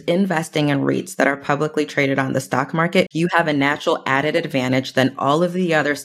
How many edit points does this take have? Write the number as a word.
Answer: one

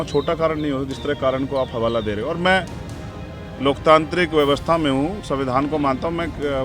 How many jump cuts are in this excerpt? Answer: zero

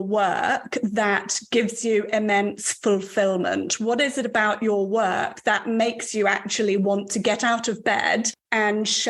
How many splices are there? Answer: zero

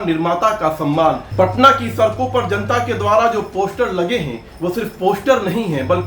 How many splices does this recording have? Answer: one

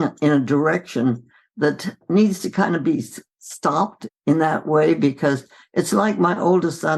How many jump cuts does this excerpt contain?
two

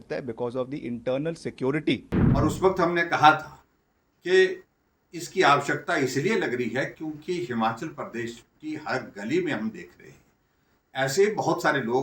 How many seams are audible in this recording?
one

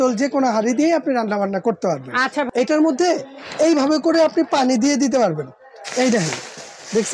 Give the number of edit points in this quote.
one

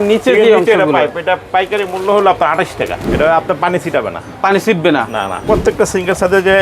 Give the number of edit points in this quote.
two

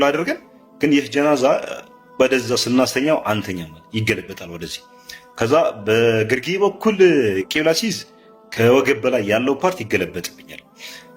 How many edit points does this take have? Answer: zero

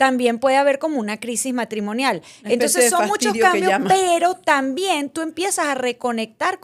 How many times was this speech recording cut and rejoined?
zero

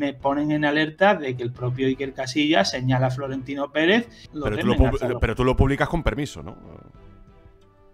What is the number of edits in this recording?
one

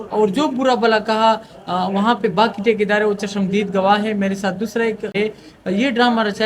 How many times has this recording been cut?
one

